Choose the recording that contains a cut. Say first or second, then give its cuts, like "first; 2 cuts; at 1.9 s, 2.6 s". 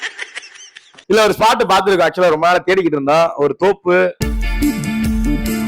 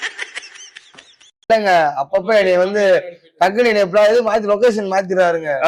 first; 2 cuts; at 1.0 s, 4.2 s